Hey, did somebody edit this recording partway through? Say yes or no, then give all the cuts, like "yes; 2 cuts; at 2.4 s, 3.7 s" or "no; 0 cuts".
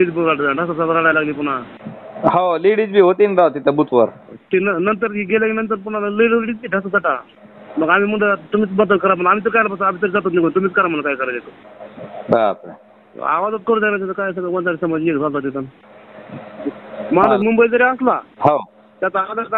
yes; 1 cut; at 16.9 s